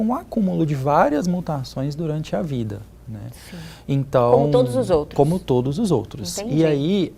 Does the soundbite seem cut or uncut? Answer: uncut